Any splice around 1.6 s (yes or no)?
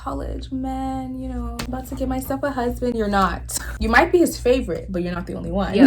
yes